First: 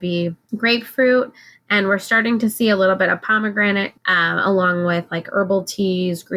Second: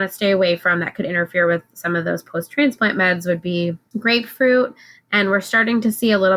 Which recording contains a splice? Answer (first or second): first